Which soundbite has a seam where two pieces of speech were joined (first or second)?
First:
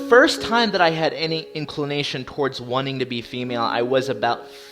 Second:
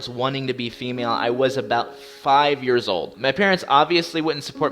second